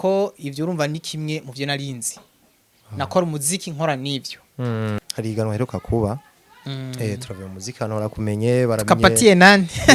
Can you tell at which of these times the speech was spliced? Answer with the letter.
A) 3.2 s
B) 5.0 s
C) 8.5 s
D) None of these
B